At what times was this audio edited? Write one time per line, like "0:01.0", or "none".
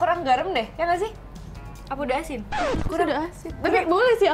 none

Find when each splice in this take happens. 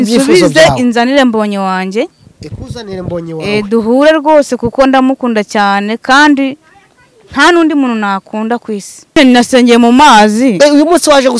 0:09.2

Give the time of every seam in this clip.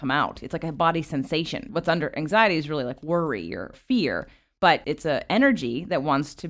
0:01.7
0:03.7

